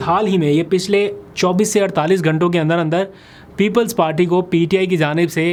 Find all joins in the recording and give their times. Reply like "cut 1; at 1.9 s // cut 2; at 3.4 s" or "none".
none